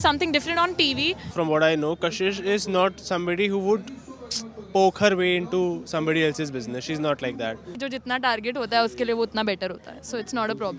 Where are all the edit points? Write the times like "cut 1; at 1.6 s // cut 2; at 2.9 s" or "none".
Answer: cut 1; at 1.3 s // cut 2; at 7.7 s